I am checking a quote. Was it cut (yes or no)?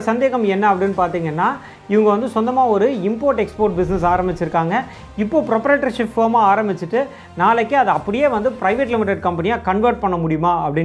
no